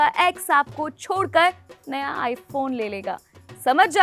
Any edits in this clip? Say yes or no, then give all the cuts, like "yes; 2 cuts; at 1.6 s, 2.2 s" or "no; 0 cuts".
no; 0 cuts